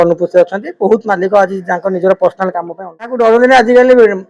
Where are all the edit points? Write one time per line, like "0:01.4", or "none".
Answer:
0:03.1